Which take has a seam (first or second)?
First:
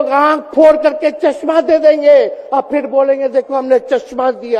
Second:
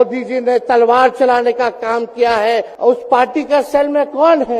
second